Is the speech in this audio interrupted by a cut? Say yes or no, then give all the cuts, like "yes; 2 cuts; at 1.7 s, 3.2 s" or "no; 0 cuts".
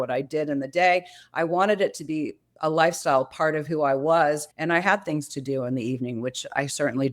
yes; 1 cut; at 4.5 s